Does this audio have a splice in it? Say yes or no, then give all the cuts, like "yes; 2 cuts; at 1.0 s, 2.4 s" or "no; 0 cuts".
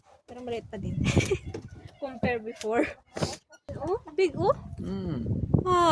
yes; 1 cut; at 3.7 s